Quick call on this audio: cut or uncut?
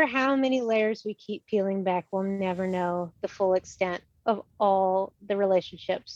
uncut